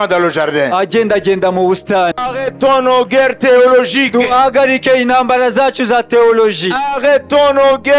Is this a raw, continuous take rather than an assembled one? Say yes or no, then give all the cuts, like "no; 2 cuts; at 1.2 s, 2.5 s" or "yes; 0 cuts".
no; 1 cut; at 2.2 s